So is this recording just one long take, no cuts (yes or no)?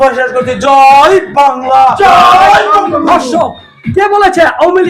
yes